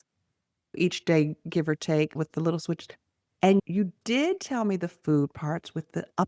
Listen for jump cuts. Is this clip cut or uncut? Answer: cut